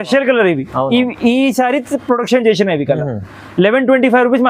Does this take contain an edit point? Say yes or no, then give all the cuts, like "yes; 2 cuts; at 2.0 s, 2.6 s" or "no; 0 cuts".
no; 0 cuts